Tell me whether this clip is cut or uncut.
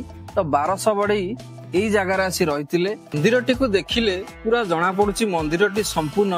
cut